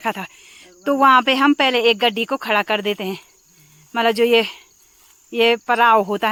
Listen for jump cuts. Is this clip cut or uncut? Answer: uncut